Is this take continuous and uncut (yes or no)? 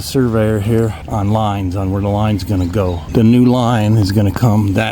no